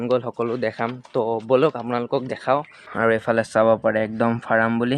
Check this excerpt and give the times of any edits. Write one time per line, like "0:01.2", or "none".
0:02.8